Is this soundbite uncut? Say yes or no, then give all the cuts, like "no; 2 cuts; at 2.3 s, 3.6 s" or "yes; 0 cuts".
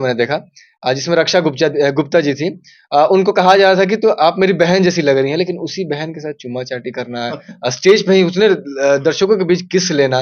yes; 0 cuts